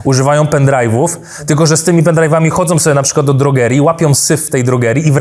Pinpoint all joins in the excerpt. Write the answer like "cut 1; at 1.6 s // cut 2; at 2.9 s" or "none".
none